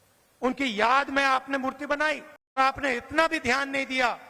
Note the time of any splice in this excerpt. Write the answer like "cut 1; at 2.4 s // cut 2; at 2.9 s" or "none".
cut 1; at 2.6 s

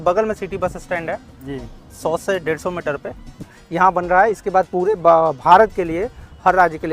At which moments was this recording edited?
cut 1; at 3.4 s

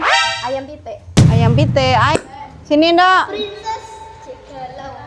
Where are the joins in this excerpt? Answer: cut 1; at 2.1 s

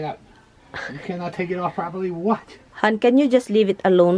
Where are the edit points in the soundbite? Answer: none

